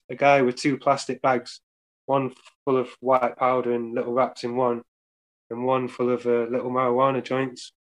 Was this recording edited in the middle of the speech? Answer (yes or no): no